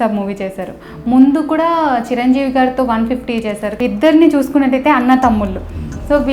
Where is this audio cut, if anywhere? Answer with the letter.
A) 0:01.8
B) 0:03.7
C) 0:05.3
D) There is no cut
B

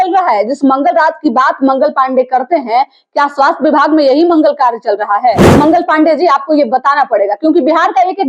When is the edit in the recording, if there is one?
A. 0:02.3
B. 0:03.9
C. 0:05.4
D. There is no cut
C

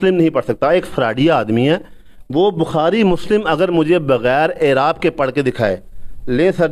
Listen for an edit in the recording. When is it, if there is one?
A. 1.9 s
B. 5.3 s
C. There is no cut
C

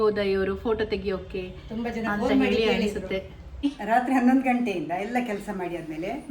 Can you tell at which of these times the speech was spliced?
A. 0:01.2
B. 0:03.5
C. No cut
B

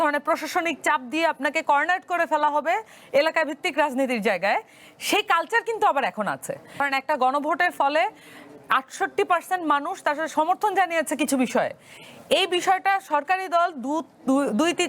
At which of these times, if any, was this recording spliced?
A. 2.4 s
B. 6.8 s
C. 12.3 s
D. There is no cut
B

